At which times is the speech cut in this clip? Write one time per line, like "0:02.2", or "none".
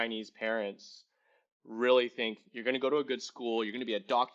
none

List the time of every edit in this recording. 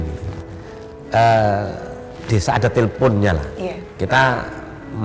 none

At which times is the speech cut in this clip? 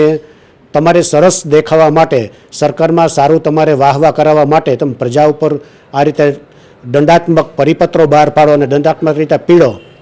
none

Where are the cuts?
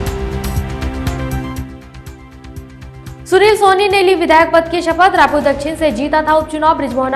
0:02.8

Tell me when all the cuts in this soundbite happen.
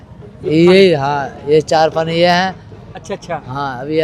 none

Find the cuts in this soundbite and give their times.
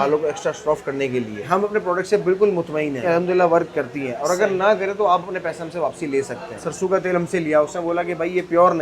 0:01.5
0:03.1
0:06.6

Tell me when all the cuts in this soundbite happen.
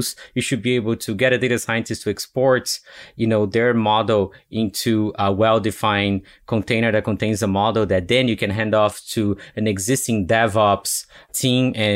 none

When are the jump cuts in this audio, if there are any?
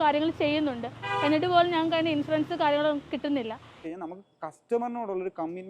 0:03.9

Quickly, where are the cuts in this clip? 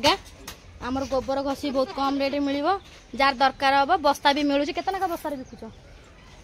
none

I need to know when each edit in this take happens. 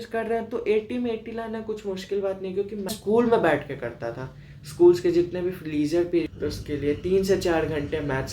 0:02.9
0:06.3

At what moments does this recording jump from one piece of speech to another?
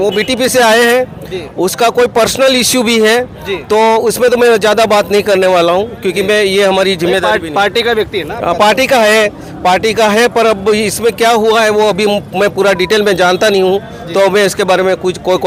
none

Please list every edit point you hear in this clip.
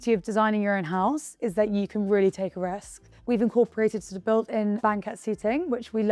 0:02.9
0:04.8

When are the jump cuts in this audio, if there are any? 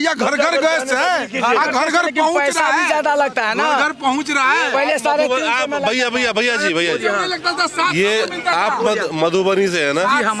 none

